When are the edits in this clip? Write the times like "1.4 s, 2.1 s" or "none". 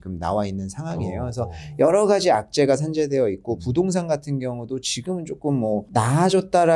none